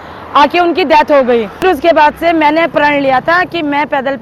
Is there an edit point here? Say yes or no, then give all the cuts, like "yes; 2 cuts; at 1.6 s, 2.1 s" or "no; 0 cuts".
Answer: yes; 1 cut; at 1.6 s